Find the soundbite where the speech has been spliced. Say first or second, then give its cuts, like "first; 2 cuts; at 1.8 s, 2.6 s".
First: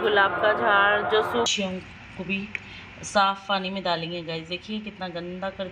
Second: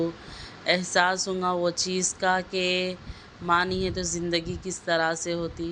first; 1 cut; at 1.5 s